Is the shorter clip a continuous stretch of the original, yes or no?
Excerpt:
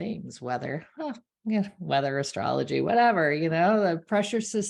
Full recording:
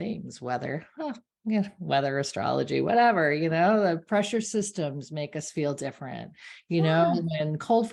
yes